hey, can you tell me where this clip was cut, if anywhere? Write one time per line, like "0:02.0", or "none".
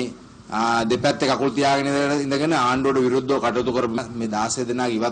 0:04.0

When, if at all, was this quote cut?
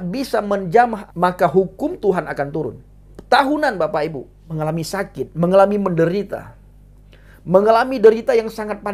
0:01.0
0:03.1
0:04.5

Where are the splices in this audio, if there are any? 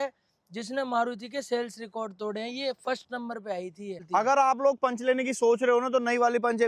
0:04.0

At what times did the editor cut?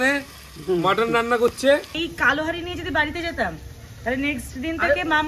0:01.9

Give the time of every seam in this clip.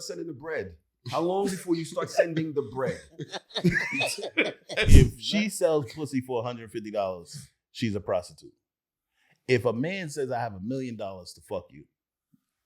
0:04.9

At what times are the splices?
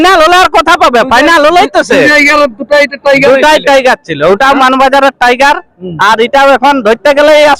none

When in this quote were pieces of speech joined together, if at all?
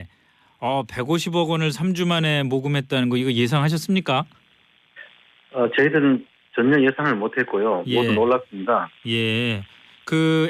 0:05.8

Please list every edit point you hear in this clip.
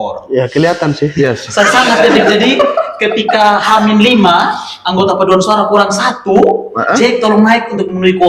none

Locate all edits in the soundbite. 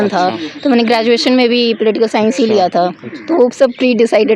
none

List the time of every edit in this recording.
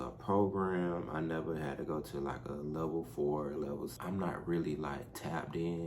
0:03.9

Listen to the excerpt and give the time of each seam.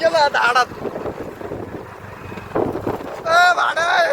none

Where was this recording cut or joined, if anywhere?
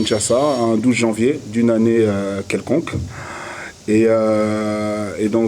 none

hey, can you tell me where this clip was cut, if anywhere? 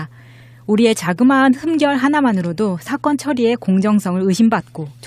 0:02.4

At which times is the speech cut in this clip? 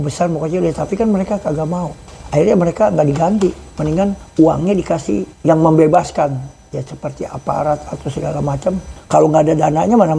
0:02.0
0:04.2
0:05.3
0:08.9

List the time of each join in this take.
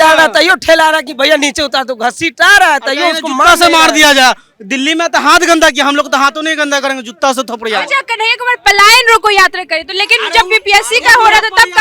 none

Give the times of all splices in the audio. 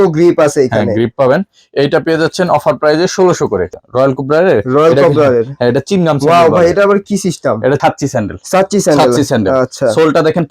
0:03.7
0:07.8

